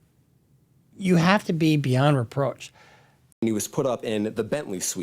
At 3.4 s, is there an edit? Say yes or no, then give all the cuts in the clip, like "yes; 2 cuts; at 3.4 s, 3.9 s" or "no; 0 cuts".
yes; 1 cut; at 3.4 s